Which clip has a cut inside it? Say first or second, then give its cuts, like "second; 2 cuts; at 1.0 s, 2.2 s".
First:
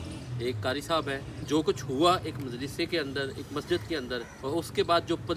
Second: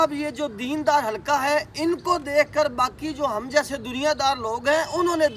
first; 2 cuts; at 1.5 s, 4.3 s